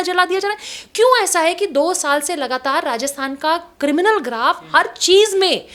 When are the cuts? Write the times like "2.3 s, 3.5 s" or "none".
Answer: none